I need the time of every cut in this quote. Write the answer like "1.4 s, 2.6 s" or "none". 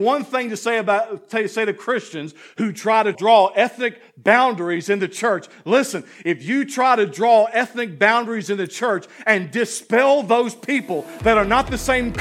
3.2 s